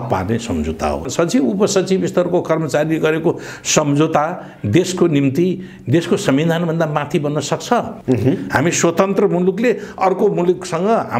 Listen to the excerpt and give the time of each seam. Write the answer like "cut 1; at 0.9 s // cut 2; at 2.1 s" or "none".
cut 1; at 1.1 s // cut 2; at 7.9 s